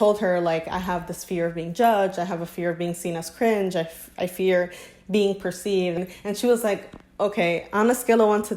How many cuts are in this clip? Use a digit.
1